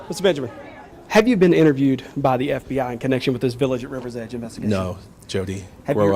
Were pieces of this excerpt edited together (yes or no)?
yes